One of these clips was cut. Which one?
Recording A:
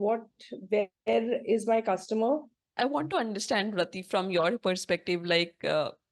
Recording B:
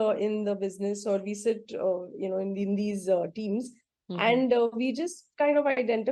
A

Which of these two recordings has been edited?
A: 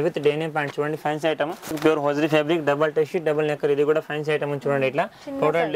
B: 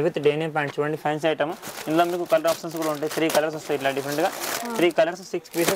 A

